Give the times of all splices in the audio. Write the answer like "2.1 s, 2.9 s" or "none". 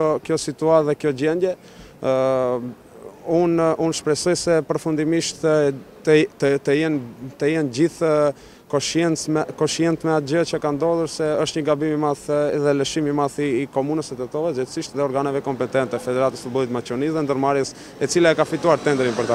10.7 s